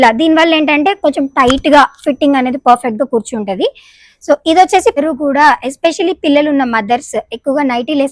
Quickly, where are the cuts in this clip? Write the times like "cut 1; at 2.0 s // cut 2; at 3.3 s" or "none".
cut 1; at 4.9 s